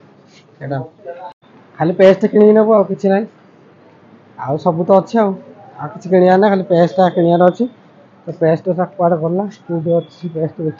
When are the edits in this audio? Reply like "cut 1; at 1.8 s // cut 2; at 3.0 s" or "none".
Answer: cut 1; at 1.3 s